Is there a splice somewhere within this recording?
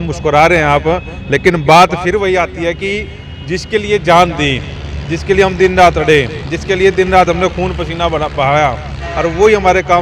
no; 0 cuts

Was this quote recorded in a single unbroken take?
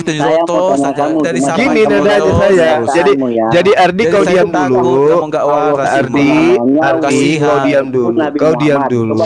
yes; 0 cuts

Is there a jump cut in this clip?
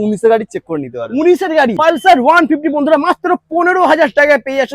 yes; 1 cut; at 1.8 s

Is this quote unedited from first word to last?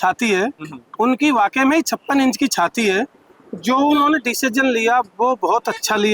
yes; 0 cuts

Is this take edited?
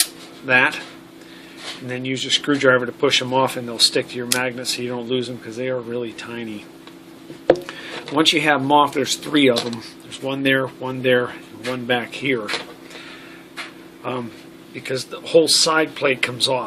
yes; 1 cut; at 4.1 s

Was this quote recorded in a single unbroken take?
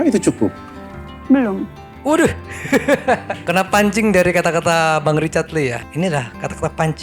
yes; 0 cuts

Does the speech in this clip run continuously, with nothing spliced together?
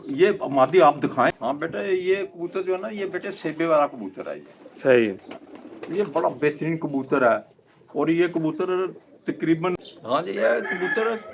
no; 2 cuts; at 1.3 s, 9.8 s

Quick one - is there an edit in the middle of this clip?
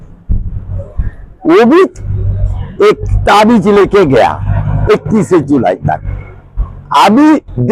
no; 0 cuts

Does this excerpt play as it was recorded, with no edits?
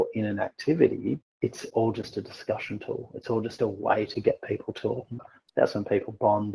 no; 2 cuts; at 1.3 s, 5.3 s

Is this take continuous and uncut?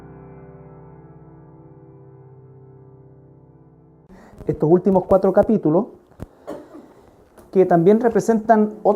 yes; 0 cuts

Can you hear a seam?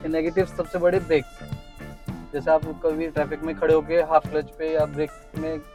no; 0 cuts

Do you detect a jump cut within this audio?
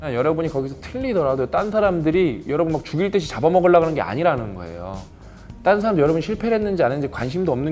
no; 0 cuts

